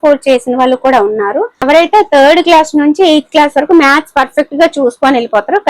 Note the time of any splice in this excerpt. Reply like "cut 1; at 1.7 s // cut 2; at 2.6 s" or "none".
cut 1; at 1.6 s